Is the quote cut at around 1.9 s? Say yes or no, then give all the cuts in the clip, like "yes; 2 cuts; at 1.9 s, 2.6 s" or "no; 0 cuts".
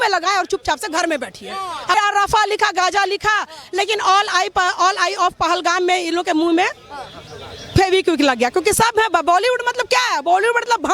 yes; 1 cut; at 1.9 s